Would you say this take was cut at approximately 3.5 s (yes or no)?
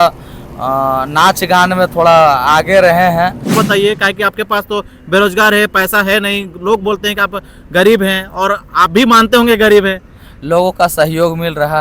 yes